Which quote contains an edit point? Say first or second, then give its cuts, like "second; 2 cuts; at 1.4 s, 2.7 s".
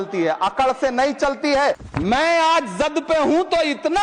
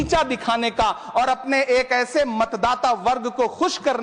first; 1 cut; at 1.9 s